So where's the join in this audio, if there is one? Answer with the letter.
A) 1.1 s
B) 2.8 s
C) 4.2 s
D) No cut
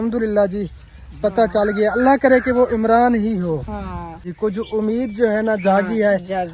C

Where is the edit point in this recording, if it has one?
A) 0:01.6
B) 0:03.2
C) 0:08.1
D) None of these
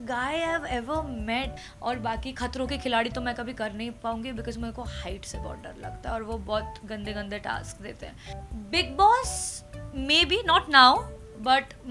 A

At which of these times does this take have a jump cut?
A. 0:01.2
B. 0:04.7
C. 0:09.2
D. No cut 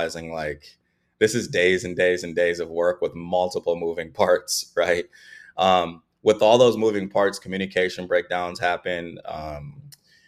D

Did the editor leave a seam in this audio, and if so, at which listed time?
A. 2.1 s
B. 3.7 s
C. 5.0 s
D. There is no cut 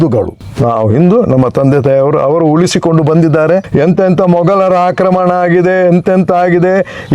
B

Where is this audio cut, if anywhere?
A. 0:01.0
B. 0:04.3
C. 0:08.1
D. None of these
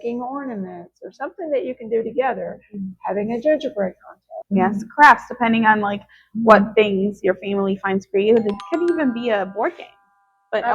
B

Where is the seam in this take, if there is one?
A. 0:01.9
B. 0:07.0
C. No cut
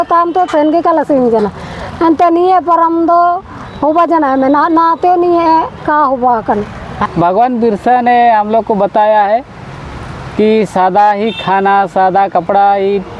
B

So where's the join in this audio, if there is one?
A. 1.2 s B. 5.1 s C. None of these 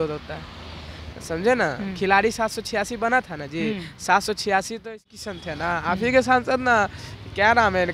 B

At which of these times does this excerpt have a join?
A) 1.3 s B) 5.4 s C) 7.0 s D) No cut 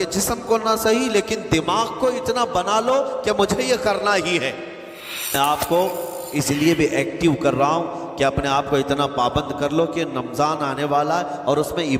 B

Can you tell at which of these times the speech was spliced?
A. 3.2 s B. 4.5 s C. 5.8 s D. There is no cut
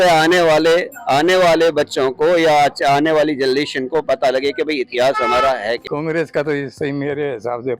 C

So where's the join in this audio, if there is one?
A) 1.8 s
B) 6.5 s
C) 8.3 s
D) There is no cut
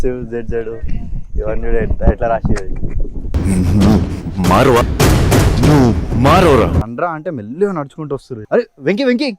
C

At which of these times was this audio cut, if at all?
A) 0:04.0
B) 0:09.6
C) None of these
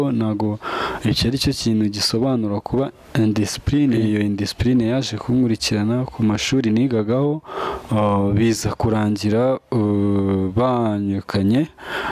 A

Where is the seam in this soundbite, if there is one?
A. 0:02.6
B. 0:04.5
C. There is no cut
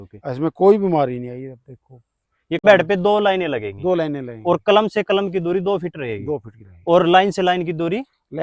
A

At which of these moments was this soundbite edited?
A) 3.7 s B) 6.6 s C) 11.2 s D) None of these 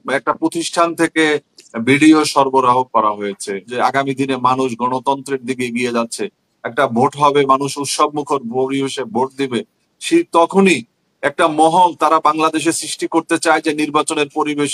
A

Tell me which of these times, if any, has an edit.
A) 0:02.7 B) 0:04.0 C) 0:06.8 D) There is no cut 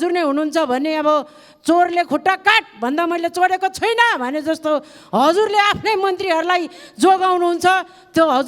D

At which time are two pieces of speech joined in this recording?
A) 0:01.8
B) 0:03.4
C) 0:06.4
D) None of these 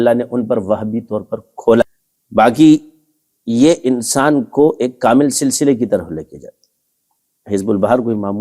A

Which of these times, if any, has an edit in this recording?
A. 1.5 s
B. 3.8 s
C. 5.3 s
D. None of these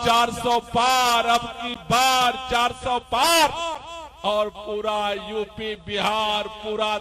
D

